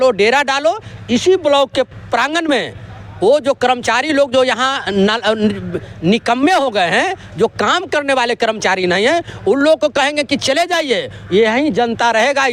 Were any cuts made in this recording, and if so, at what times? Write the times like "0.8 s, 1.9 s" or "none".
none